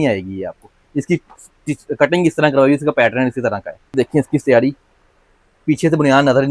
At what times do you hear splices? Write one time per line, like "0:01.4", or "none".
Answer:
0:03.9

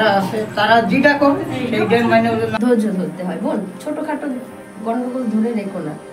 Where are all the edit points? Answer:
0:02.5

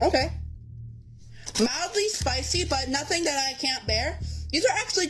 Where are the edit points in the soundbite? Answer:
none

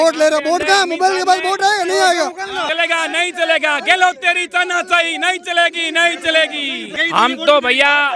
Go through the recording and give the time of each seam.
0:02.7
0:07.0

